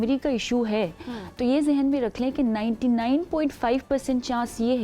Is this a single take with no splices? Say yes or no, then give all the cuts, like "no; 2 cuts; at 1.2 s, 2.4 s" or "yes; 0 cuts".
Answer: yes; 0 cuts